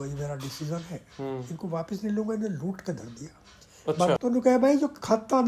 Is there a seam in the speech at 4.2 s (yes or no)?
yes